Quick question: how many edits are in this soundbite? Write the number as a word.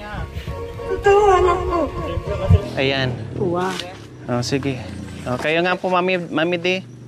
one